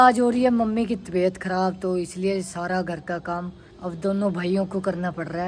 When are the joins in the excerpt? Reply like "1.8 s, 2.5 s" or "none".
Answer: none